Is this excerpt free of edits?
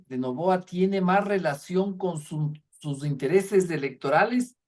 yes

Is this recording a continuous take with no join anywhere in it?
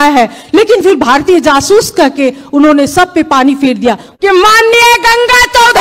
no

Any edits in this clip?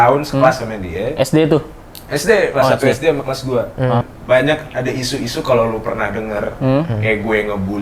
yes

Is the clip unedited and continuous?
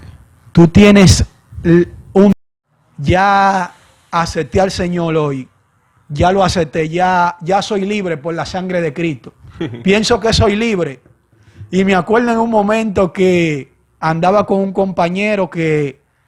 no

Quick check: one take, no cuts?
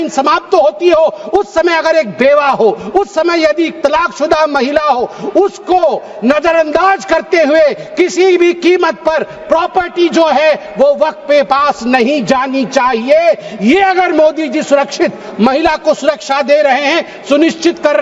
yes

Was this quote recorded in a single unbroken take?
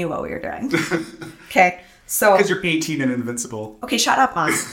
yes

